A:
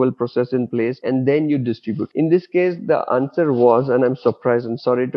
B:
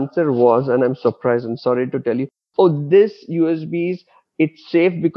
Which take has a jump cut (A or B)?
A